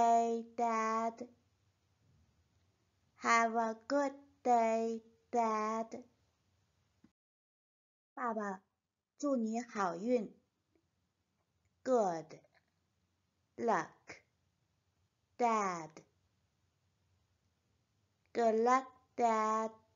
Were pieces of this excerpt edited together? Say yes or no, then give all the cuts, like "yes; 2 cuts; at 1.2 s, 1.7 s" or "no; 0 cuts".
no; 0 cuts